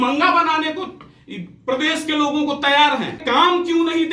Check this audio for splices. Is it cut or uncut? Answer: cut